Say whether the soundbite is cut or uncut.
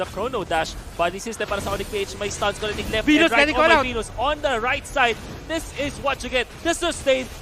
uncut